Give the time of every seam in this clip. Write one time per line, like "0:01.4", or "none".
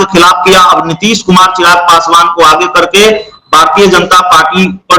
none